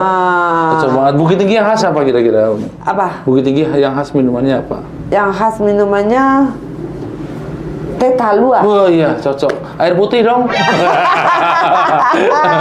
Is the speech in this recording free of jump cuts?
no; 1 cut; at 10.3 s

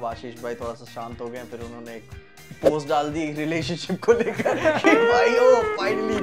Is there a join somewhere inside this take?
no; 0 cuts

